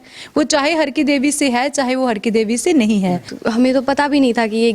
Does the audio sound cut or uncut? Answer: cut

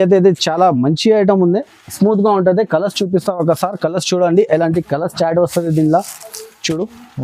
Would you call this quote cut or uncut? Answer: uncut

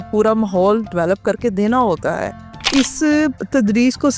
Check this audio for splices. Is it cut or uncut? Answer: cut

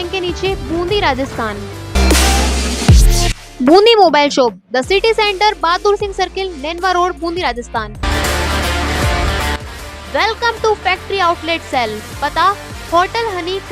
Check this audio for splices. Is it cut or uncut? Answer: cut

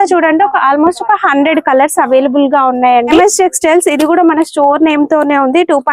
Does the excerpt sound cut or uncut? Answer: cut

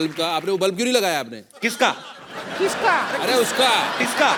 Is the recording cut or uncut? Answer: uncut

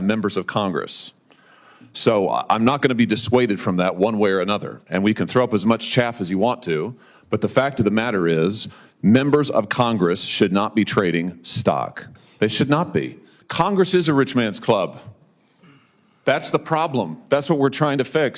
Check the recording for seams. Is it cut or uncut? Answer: cut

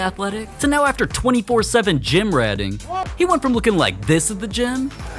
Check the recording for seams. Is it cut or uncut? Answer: cut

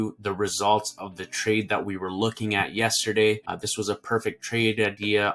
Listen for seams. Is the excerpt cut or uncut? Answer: cut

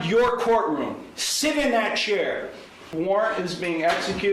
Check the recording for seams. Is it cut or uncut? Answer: cut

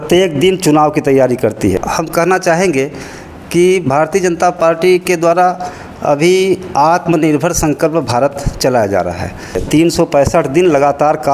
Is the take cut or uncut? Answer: cut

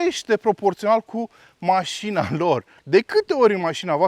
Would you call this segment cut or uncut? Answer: cut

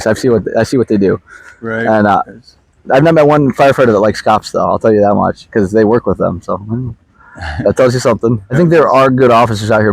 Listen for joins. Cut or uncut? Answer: uncut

